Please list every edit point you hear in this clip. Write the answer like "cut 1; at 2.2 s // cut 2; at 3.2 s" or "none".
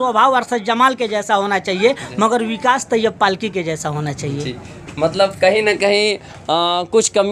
none